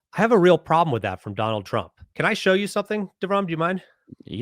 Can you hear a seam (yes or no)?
yes